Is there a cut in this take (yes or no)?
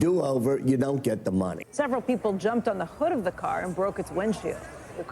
yes